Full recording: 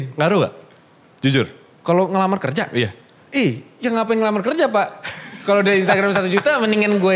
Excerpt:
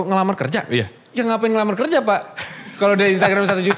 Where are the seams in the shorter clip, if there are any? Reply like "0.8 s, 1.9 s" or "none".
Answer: 1.0 s